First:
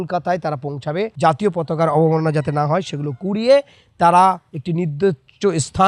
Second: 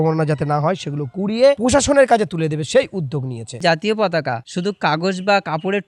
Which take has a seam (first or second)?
second